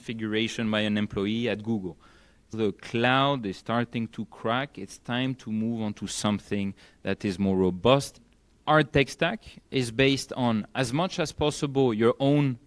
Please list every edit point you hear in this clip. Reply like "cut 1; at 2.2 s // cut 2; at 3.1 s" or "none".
cut 1; at 2.5 s // cut 2; at 8.2 s